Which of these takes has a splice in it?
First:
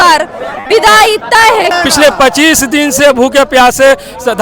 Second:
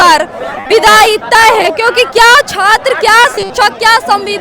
first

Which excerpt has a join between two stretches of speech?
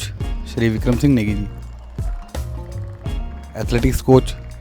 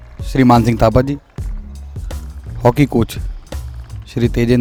first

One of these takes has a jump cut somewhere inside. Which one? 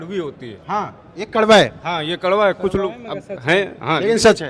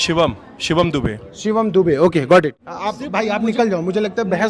second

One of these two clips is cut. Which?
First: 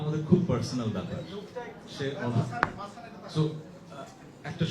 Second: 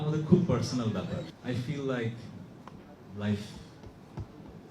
second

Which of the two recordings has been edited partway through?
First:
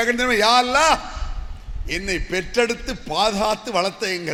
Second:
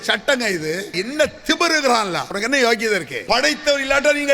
second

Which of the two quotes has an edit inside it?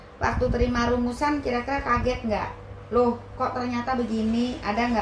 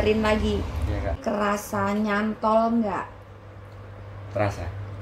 second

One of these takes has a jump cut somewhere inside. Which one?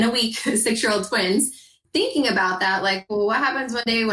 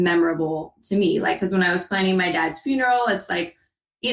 first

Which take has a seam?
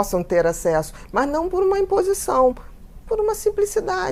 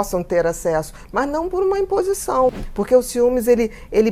second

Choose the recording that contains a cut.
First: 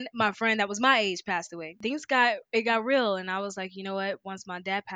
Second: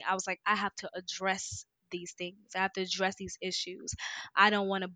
first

